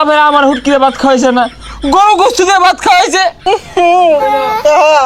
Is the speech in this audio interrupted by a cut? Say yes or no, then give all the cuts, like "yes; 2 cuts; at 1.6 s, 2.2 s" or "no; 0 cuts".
yes; 1 cut; at 3.4 s